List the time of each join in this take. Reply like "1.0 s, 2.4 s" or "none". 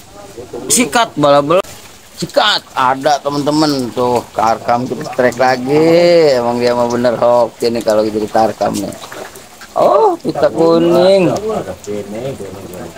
1.6 s